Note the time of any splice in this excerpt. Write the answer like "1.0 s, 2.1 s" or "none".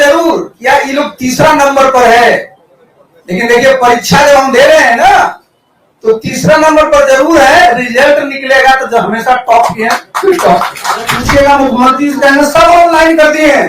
11.2 s